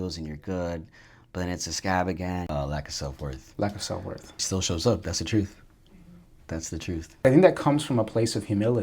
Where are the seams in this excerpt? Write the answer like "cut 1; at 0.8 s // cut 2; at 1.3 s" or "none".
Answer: cut 1; at 2.5 s // cut 2; at 4.3 s // cut 3; at 7.2 s